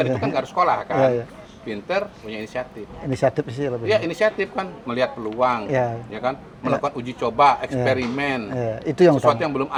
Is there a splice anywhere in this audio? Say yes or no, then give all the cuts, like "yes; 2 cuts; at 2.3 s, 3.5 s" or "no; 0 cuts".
no; 0 cuts